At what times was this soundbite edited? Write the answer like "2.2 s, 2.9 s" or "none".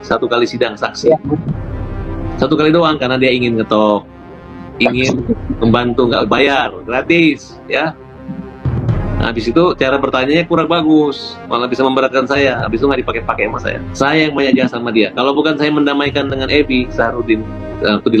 none